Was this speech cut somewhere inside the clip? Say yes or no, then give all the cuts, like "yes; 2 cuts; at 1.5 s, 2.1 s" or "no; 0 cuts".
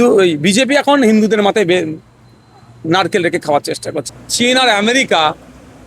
yes; 1 cut; at 4.0 s